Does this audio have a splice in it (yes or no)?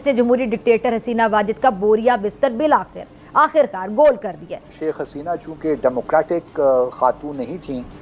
yes